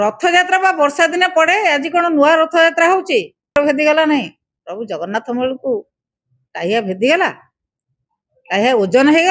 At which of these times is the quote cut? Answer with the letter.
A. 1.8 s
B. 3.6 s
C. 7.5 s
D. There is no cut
B